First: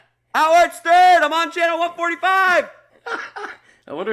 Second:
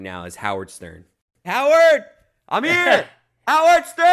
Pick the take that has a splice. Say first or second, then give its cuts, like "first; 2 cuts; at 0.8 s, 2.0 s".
second; 1 cut; at 1.3 s